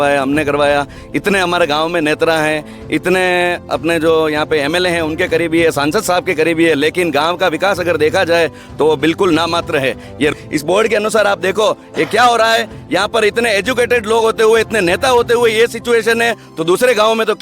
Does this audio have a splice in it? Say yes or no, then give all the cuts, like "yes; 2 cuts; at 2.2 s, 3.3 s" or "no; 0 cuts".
yes; 1 cut; at 10.3 s